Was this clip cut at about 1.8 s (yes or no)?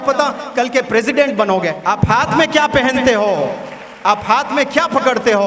yes